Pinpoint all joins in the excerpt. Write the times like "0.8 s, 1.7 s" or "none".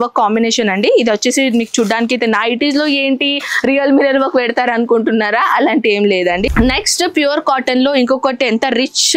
6.5 s